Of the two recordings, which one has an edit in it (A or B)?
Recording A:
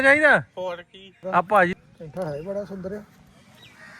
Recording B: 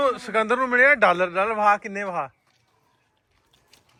A